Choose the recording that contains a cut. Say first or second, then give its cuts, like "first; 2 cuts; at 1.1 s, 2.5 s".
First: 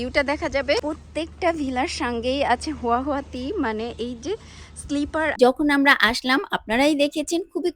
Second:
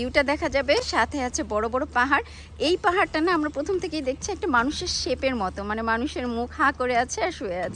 first; 2 cuts; at 0.8 s, 5.3 s